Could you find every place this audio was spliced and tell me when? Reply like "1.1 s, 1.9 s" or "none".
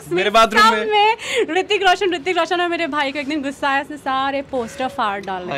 none